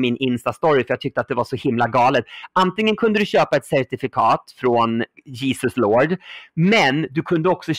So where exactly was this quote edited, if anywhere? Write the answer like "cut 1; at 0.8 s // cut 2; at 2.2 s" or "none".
cut 1; at 5.2 s